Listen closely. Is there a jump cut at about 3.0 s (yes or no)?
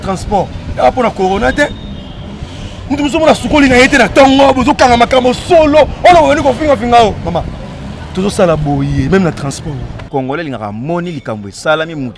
no